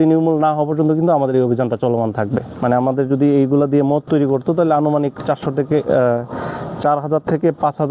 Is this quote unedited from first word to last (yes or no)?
no